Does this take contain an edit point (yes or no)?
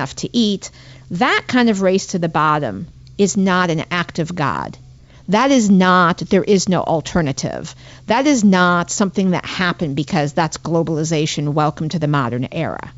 no